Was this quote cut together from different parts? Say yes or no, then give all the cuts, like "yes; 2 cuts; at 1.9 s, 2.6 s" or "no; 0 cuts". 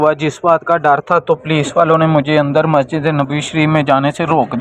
no; 0 cuts